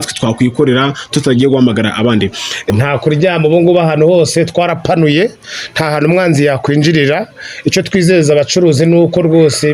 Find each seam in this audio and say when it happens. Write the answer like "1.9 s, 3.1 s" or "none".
2.7 s